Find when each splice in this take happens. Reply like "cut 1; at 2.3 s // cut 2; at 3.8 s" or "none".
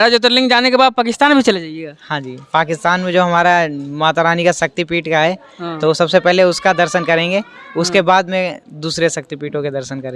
none